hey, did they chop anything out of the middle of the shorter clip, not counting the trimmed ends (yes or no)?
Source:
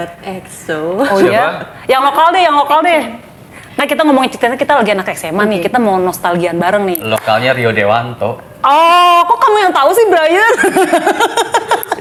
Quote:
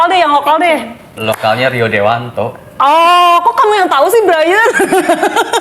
yes